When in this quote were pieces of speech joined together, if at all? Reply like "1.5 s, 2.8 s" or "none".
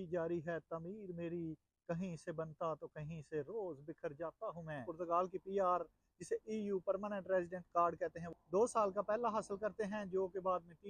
4.9 s, 8.4 s